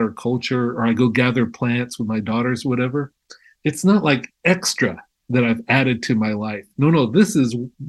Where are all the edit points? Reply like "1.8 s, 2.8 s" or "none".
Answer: none